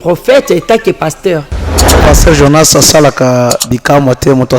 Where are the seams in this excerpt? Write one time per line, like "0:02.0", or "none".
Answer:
0:02.0